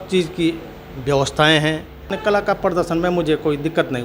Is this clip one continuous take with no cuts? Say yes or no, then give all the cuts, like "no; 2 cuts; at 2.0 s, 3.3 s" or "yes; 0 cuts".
no; 1 cut; at 2.1 s